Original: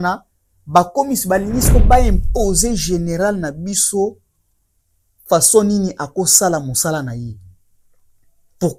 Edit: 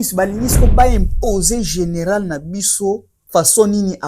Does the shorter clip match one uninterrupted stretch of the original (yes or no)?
no